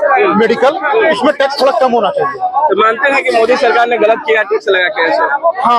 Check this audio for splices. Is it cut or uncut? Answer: uncut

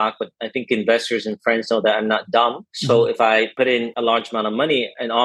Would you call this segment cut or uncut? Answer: cut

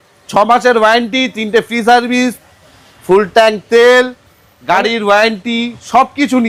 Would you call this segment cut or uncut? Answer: uncut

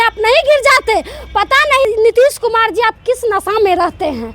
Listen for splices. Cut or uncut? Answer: cut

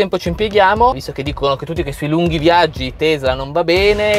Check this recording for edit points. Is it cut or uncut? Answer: uncut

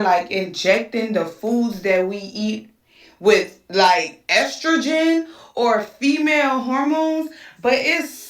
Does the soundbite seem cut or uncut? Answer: cut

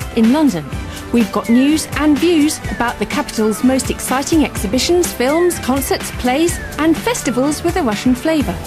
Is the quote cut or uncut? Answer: uncut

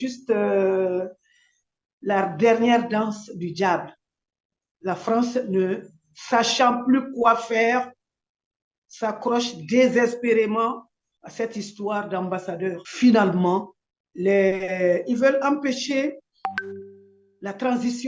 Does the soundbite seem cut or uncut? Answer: cut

